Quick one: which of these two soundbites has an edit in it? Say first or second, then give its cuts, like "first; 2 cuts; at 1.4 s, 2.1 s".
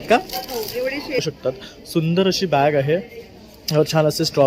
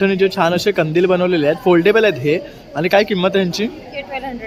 first; 1 cut; at 1.2 s